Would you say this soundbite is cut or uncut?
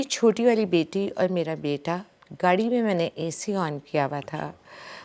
uncut